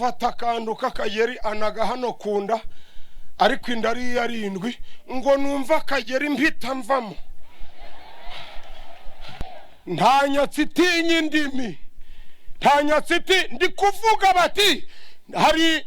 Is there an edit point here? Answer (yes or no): yes